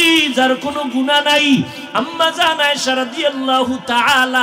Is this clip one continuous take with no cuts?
yes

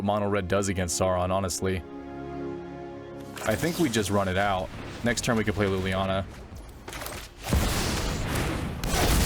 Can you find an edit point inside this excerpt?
no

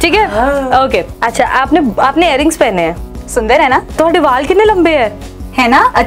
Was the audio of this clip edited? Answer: yes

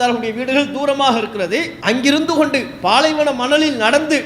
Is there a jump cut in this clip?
yes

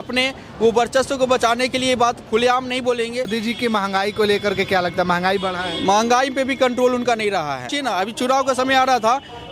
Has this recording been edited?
yes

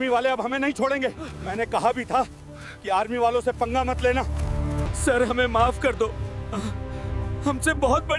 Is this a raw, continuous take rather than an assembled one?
no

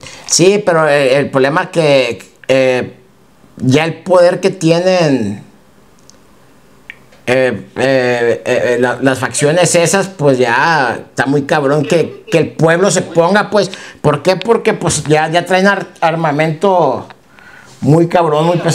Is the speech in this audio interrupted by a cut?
no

